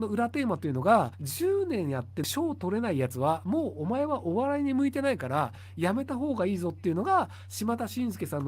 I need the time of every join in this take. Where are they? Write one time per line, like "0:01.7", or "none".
0:01.2
0:02.2

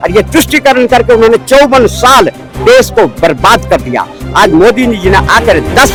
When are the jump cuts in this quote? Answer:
none

